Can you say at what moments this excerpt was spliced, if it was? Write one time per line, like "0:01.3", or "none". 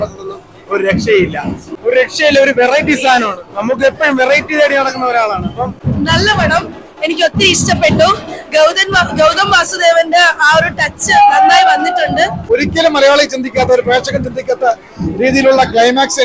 0:01.7
0:05.8
0:12.5